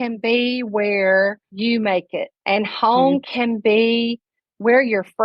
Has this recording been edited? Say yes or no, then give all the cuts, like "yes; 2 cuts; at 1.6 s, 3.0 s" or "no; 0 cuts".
yes; 2 cuts; at 1.5 s, 2.3 s